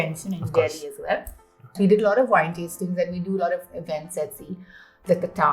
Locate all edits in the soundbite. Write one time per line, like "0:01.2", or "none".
0:01.6